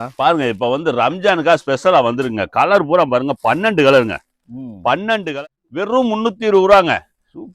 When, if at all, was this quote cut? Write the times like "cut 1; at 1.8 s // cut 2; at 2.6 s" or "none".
cut 1; at 5.2 s